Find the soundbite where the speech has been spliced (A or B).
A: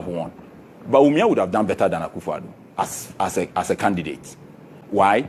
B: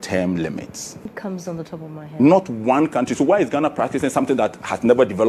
B